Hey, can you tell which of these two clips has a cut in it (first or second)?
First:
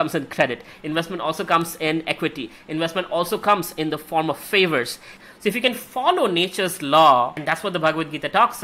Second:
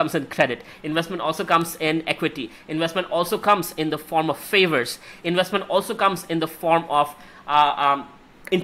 first